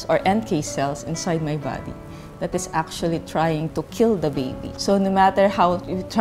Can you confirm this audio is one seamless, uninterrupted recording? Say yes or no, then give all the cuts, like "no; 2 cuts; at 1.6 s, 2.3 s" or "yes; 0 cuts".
yes; 0 cuts